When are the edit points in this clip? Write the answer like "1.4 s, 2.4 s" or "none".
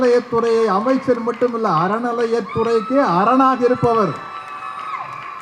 none